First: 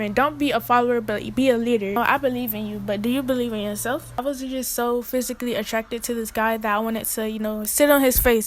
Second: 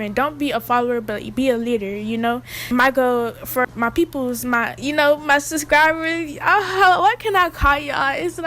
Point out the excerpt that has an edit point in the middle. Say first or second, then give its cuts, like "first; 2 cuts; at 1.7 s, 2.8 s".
first; 2 cuts; at 2.0 s, 4.2 s